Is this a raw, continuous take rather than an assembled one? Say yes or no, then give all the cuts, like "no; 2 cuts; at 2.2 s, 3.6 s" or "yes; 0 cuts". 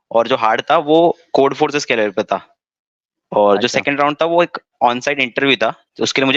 yes; 0 cuts